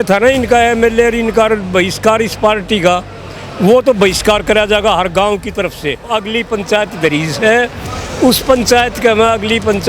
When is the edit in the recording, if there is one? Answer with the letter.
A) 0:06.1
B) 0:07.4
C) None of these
A